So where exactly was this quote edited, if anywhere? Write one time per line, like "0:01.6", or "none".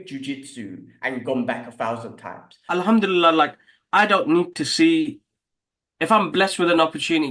0:02.7